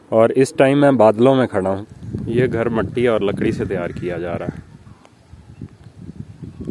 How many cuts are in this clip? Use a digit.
1